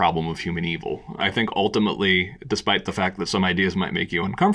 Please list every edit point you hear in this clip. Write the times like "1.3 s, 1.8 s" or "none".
1.2 s